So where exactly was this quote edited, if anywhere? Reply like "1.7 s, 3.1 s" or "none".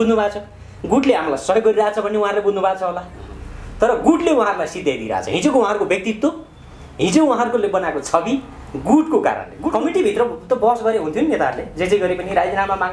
9.6 s